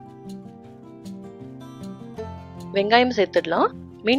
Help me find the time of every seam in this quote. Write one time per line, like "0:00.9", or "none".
0:01.0

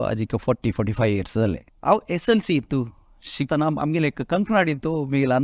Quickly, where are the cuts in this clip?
0:01.7
0:03.5

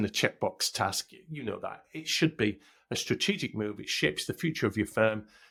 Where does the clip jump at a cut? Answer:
none

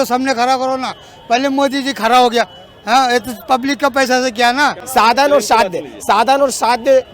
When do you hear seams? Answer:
0:04.8

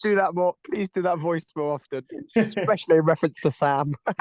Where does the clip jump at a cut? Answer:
none

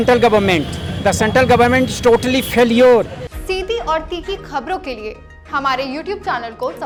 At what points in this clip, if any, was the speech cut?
none

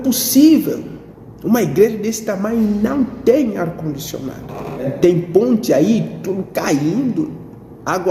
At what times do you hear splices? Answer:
0:04.9

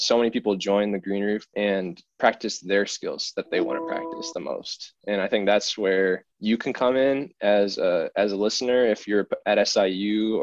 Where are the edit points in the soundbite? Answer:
0:01.5
0:06.3

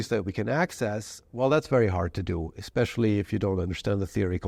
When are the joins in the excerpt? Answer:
none

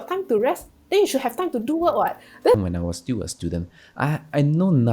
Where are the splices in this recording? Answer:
0:02.6

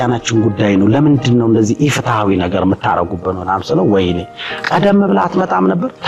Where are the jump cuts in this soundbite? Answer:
none

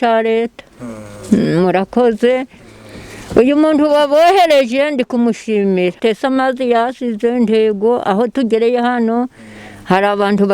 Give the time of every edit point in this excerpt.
0:06.0

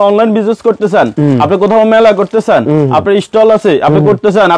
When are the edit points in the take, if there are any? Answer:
none

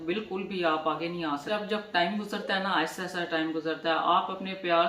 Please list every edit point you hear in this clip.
0:01.5

